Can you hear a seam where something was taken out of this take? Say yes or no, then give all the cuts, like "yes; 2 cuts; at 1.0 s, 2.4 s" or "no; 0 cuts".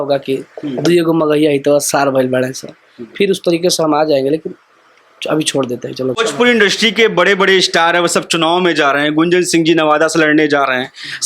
yes; 1 cut; at 6.2 s